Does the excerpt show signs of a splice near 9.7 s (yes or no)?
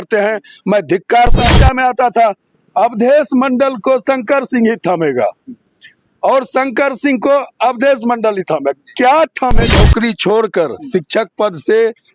yes